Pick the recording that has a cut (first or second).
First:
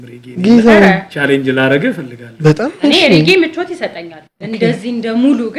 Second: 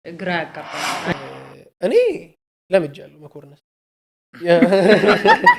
second